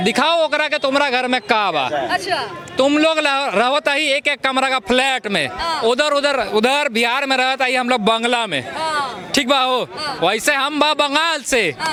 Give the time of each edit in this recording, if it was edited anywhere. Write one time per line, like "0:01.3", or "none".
none